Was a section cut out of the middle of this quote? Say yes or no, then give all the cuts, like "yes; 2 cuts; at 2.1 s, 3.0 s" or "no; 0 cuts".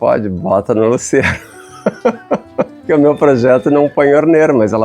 yes; 1 cut; at 2.8 s